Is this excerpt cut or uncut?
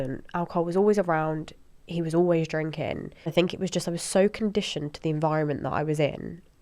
cut